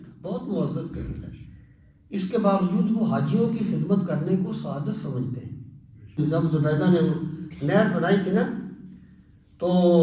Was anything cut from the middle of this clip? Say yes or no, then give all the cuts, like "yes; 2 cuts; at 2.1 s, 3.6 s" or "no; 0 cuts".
yes; 1 cut; at 6.2 s